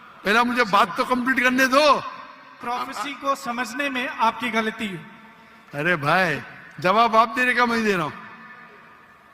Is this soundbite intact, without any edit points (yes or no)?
no